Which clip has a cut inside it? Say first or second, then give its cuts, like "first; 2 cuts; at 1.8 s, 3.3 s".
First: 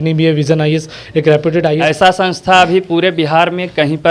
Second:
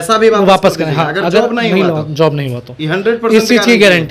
first; 1 cut; at 1.8 s